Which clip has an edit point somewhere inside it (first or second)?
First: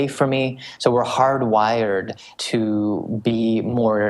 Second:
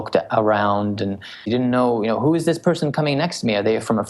second